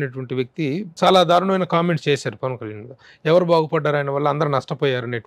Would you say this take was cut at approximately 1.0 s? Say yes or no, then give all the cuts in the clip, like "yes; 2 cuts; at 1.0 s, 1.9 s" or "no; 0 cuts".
yes; 1 cut; at 1.0 s